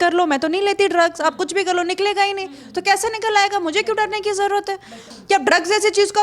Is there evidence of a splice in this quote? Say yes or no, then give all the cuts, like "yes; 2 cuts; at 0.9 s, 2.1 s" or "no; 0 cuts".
yes; 1 cut; at 5.1 s